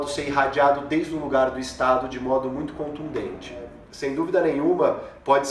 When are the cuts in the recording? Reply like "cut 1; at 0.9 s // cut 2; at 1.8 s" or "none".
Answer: cut 1; at 3.8 s